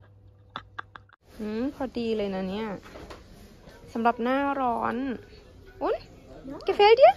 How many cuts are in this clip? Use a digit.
1